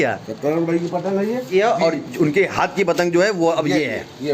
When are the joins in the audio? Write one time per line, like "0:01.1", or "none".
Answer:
0:01.5